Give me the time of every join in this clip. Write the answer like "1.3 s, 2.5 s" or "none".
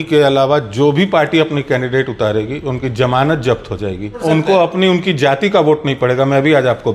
4.2 s